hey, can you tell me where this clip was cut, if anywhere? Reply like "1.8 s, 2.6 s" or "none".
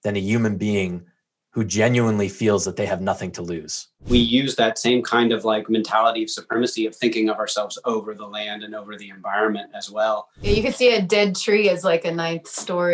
4.1 s, 10.5 s